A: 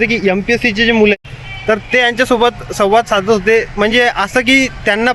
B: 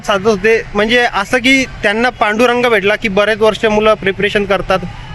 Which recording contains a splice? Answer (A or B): A